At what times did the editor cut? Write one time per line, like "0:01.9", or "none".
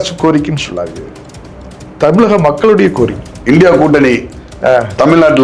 0:03.2